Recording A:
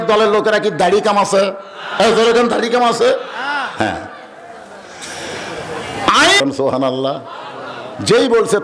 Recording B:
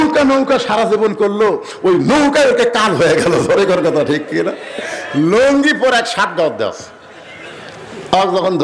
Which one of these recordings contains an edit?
A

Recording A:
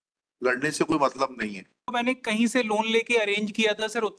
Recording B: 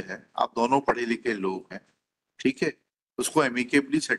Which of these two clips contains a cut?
A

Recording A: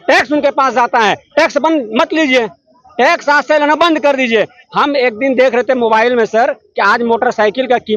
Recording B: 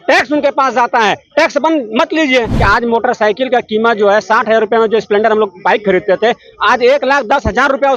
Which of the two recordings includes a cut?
B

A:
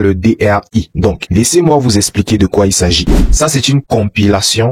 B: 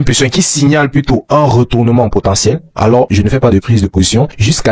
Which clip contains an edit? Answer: A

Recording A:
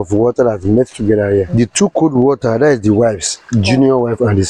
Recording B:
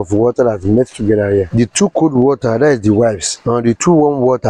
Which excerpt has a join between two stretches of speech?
B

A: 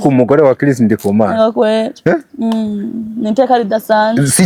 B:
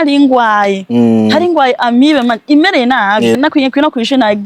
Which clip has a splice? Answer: B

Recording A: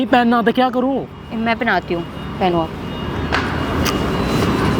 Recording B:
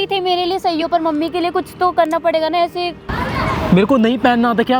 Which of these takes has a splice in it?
B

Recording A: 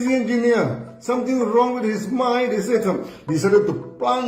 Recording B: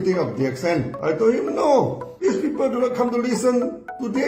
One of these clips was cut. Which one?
B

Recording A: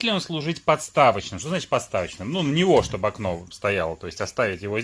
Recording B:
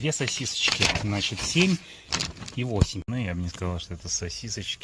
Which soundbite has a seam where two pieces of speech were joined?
B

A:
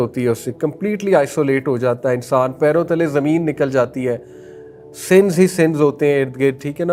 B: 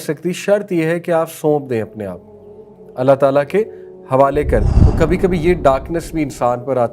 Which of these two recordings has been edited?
B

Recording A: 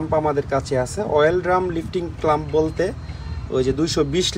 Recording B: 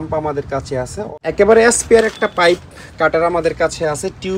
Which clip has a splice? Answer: B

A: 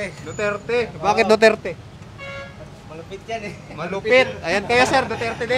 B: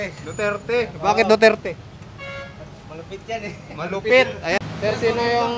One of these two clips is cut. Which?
B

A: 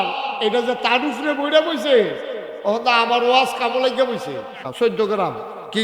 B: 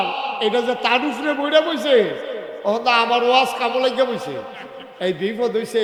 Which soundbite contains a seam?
A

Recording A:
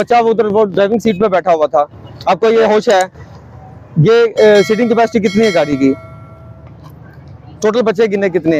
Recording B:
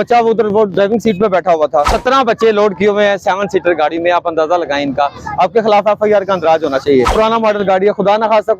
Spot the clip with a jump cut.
B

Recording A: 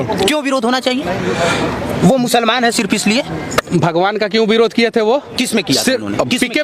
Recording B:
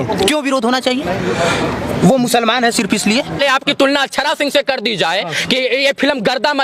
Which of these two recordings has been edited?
B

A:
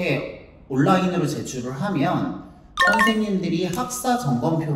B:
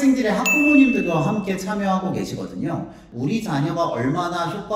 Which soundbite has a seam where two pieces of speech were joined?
B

